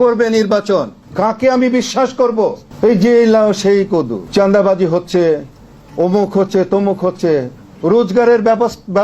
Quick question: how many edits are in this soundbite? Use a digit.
3